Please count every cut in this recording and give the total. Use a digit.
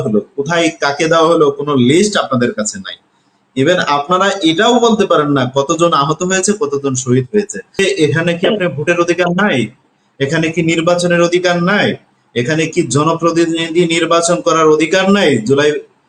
1